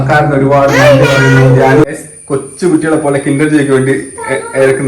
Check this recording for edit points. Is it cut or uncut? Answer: cut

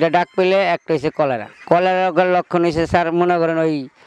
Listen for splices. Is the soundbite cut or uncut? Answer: cut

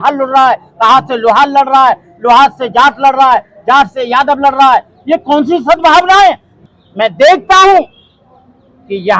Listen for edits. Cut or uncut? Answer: cut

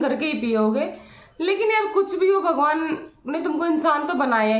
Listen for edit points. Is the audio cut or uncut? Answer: uncut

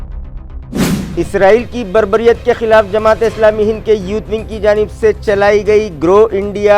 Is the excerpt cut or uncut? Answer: cut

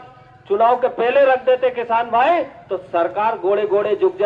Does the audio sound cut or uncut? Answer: uncut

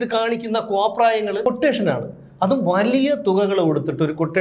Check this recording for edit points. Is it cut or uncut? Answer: cut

